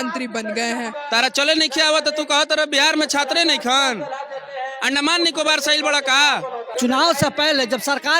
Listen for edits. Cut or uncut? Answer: cut